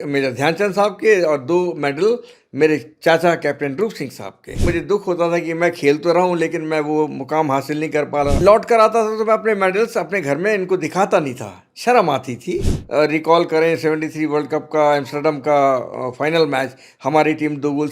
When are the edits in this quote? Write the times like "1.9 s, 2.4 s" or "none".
4.6 s, 8.4 s, 12.8 s